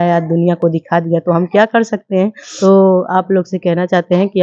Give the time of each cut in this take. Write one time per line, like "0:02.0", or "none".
0:02.4